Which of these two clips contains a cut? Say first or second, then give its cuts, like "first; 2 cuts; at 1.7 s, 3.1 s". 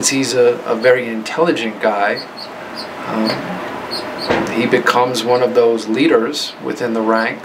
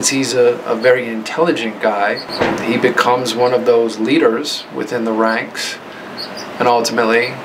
second; 1 cut; at 2.3 s